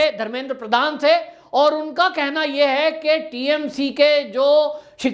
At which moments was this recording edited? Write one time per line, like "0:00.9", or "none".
none